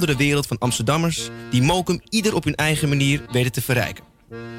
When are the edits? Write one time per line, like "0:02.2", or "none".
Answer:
none